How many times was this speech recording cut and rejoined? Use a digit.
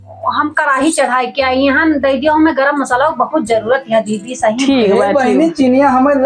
0